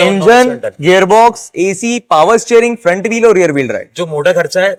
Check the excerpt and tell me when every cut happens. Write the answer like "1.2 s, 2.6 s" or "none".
none